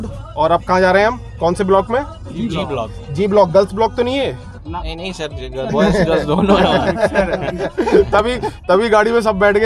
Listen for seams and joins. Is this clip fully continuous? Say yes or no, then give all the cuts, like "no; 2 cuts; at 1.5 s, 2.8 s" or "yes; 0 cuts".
yes; 0 cuts